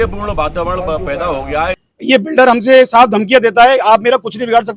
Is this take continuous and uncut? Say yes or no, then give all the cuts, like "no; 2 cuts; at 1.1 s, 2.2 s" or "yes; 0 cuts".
no; 1 cut; at 1.9 s